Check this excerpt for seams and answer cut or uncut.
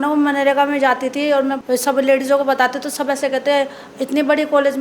cut